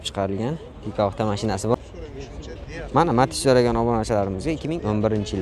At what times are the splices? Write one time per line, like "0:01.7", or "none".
0:01.8